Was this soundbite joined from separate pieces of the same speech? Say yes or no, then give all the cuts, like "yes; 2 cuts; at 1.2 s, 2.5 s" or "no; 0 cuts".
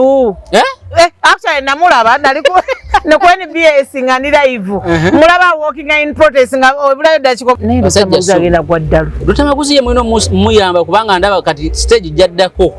yes; 1 cut; at 7.5 s